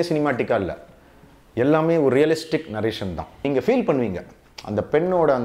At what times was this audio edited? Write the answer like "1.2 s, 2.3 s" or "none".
3.4 s